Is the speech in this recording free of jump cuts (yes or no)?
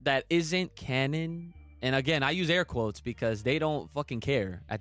yes